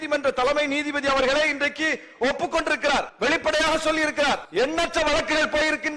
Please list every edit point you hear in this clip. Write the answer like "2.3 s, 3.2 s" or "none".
3.1 s, 4.4 s